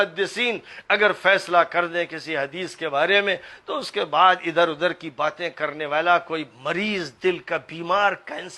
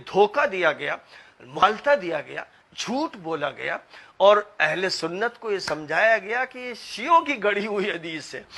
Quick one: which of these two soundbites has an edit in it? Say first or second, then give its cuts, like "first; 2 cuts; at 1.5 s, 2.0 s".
second; 1 cut; at 1.6 s